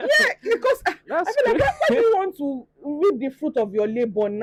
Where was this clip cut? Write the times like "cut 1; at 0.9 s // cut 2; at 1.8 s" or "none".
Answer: none